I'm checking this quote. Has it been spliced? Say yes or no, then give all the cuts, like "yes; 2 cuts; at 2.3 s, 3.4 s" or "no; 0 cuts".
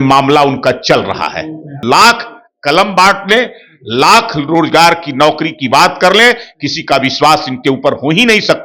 yes; 1 cut; at 1.8 s